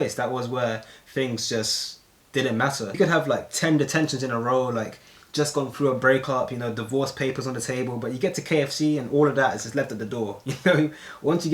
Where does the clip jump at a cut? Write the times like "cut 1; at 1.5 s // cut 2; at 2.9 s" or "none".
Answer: cut 1; at 3.0 s